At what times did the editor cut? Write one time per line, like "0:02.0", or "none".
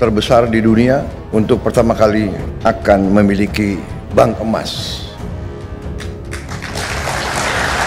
0:01.2
0:02.5
0:05.2
0:06.9